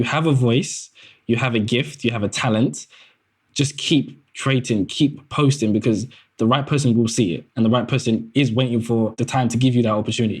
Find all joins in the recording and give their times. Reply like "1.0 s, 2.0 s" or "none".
9.1 s